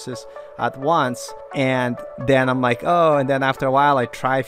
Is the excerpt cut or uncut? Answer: cut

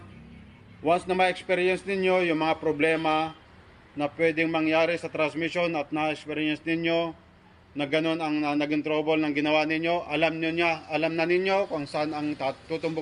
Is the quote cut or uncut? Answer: uncut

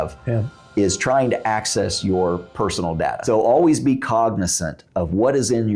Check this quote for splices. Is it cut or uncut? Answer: cut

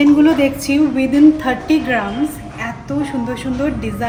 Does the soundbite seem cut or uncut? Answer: uncut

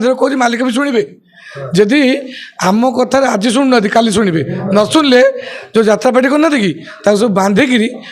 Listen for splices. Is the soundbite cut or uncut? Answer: uncut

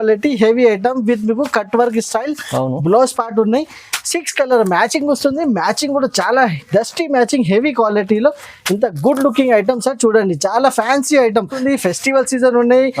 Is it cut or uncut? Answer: cut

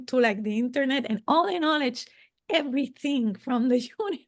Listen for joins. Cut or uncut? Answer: uncut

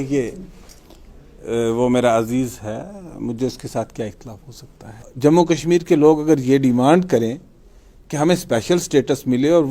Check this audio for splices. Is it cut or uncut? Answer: cut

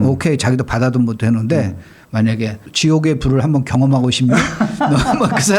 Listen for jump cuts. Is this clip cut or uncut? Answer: cut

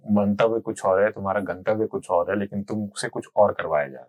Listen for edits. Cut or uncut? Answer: uncut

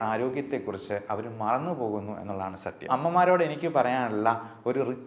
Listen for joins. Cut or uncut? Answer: cut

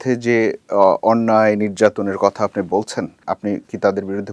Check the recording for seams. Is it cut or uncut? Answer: cut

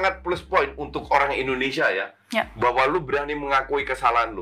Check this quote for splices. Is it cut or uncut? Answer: uncut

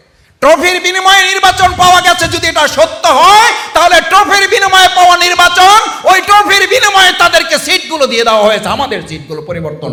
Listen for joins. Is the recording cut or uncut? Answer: uncut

